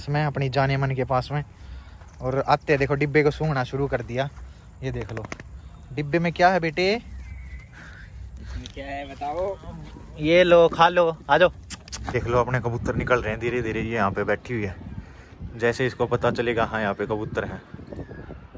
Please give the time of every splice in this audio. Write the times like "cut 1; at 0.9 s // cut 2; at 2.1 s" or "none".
cut 1; at 11.9 s

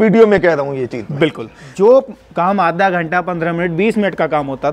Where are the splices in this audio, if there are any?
cut 1; at 1.6 s

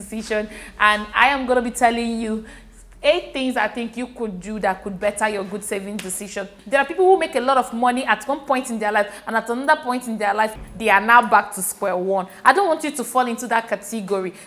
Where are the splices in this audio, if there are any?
cut 1; at 6.5 s // cut 2; at 10.6 s

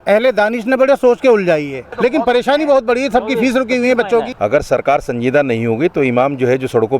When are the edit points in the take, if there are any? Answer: cut 1; at 1.9 s // cut 2; at 4.3 s

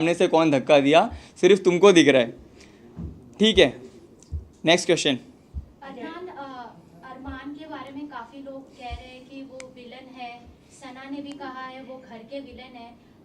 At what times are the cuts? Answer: none

